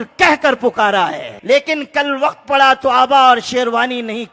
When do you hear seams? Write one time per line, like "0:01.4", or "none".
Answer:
0:01.3